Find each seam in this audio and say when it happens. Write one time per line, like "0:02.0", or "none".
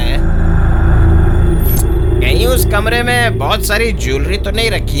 none